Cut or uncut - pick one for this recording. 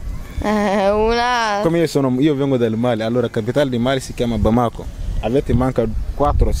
uncut